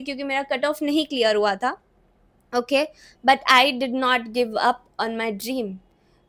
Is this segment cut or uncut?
uncut